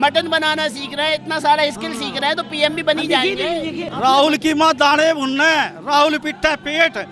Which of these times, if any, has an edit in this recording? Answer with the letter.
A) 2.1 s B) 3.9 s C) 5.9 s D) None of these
B